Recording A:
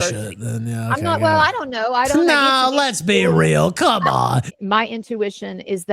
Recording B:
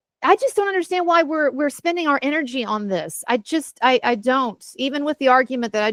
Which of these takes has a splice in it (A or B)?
A